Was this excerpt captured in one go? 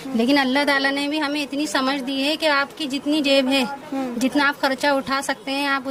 yes; 0 cuts

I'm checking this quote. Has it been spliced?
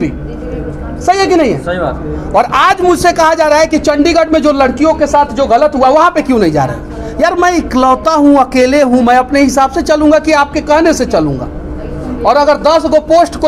no; 0 cuts

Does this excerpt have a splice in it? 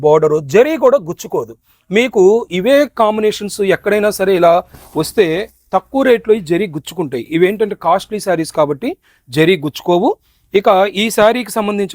no; 0 cuts

